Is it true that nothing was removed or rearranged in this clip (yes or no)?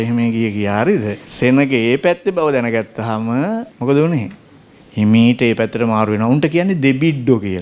no